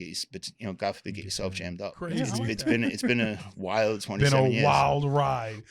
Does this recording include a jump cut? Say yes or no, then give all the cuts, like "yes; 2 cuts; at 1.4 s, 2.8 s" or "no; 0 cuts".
yes; 1 cut; at 2.4 s